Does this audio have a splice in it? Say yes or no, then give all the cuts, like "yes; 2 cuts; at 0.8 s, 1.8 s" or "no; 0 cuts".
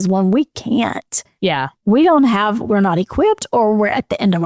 no; 0 cuts